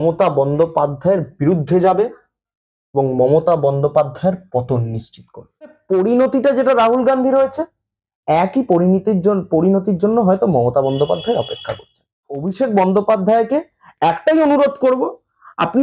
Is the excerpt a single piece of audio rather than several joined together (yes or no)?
no